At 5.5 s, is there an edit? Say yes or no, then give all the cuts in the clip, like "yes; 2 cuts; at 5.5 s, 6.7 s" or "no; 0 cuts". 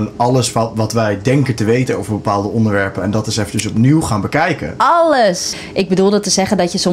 yes; 1 cut; at 5.5 s